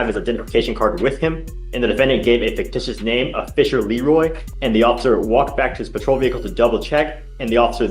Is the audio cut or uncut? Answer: cut